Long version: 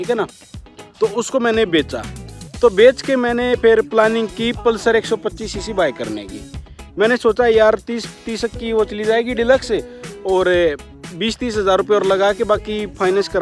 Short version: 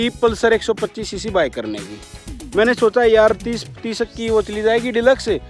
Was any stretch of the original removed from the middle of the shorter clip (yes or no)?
no